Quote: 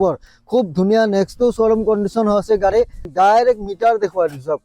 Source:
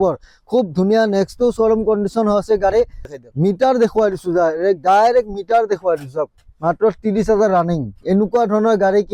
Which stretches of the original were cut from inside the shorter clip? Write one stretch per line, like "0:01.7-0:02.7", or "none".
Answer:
0:03.1-0:04.8

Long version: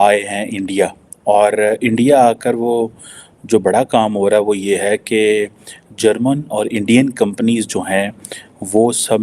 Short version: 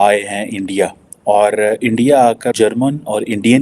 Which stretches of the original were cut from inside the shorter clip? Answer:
0:02.5-0:06.0

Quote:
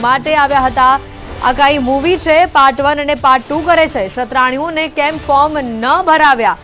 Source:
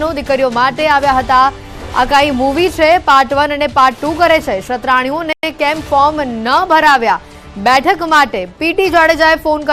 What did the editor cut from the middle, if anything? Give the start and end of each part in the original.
0:05.4-0:05.5

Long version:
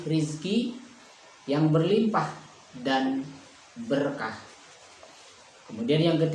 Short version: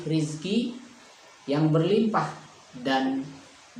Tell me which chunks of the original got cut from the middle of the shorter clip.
none

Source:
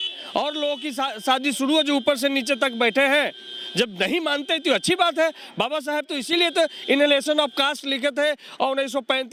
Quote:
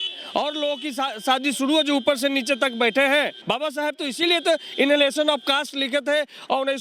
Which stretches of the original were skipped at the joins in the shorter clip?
0:03.4-0:05.5

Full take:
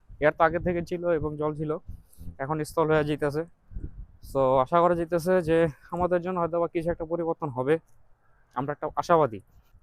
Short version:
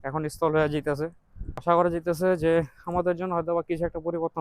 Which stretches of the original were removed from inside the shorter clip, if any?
0:04.0-0:04.7

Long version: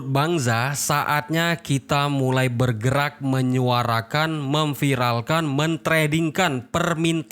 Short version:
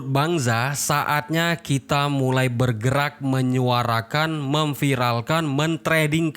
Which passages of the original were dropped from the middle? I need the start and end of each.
none

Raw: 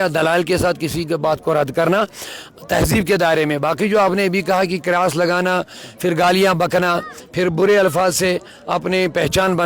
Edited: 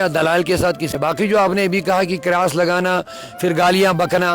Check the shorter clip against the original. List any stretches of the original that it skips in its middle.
0:00.9-0:03.5

